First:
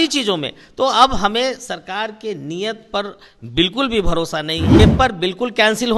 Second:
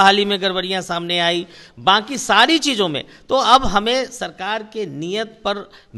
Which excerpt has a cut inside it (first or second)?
first